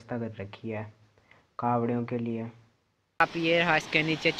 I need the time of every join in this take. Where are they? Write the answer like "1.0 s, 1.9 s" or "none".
3.2 s

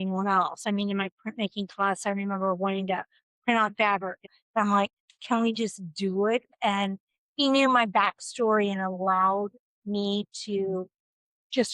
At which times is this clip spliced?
4.2 s, 6.5 s

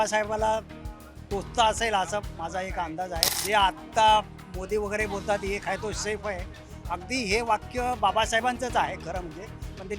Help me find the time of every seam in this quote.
3.3 s

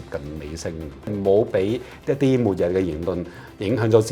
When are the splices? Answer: 1.2 s

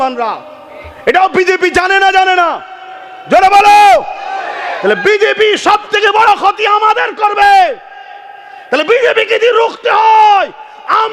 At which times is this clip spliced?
none

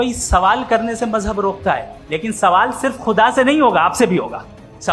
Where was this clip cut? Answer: 2.0 s

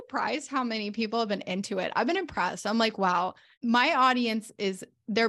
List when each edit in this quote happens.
3.5 s

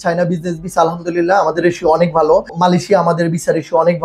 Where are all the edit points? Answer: 2.5 s

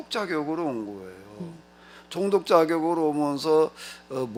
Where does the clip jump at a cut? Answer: none

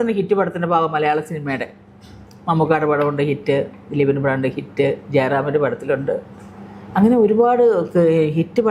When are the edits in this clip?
none

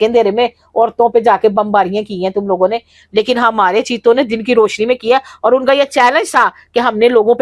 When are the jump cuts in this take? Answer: none

